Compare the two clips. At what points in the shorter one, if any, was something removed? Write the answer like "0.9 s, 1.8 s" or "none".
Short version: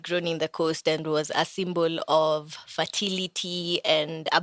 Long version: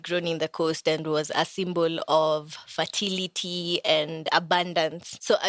none